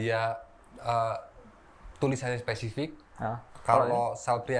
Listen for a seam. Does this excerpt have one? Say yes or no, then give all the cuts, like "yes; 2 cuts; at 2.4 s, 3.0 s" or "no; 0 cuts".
no; 0 cuts